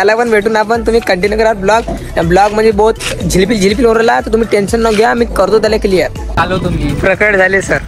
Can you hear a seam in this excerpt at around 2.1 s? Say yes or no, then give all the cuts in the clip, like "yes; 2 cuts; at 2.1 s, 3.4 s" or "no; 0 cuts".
no; 0 cuts